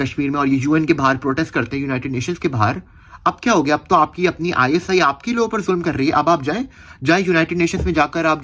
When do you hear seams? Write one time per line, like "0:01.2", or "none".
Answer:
none